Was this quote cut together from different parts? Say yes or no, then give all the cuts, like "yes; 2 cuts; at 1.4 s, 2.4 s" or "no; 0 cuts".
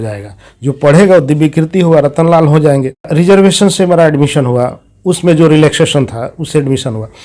yes; 1 cut; at 3.1 s